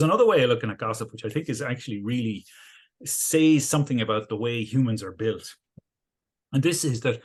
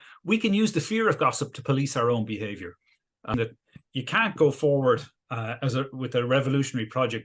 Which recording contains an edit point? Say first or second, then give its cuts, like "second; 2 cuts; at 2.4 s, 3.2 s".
second; 1 cut; at 3.3 s